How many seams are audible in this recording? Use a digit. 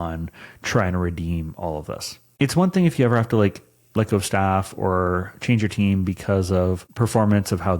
2